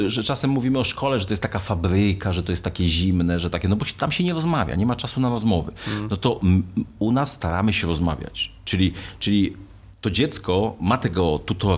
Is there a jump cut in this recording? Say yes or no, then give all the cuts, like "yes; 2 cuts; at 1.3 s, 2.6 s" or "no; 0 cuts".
no; 0 cuts